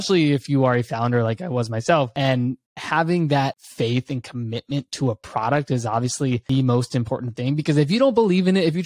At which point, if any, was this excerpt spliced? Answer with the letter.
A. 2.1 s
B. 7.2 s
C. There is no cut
A